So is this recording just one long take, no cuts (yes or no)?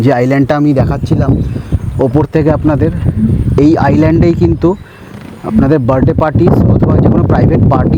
yes